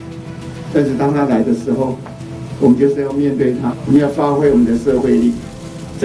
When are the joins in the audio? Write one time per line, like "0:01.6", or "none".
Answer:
0:03.7